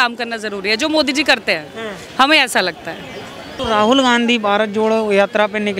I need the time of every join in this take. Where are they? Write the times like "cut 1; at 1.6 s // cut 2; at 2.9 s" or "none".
cut 1; at 3.5 s